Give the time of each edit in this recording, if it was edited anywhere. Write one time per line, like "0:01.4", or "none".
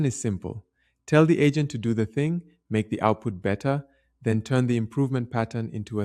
none

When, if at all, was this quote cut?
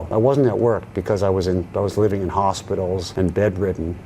none

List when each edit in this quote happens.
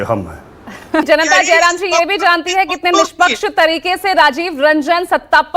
0:01.1

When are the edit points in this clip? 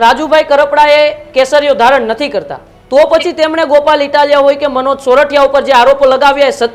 none

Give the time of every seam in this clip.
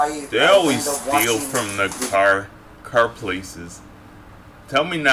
none

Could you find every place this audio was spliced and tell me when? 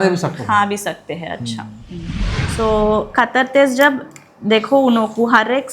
0:02.4

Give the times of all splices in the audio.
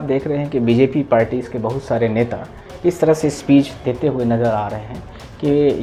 none

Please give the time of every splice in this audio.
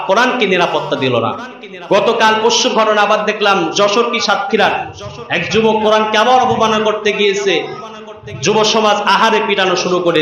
none

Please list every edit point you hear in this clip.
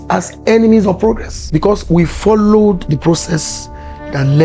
0:01.3
0:02.8

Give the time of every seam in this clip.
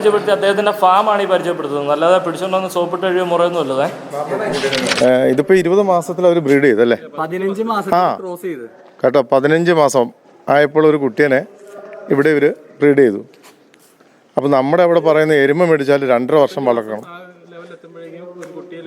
0:04.9

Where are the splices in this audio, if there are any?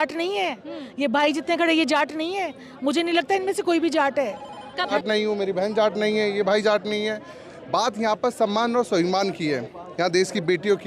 0:04.9

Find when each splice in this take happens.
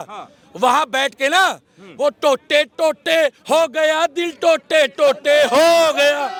none

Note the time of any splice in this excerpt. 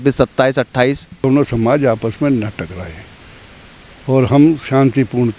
0:01.2

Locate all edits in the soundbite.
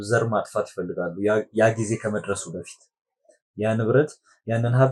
none

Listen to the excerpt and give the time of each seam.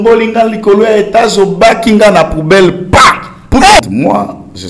0:03.8

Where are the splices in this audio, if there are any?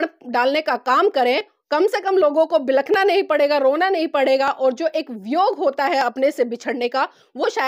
none

